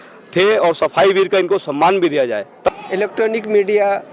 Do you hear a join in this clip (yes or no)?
yes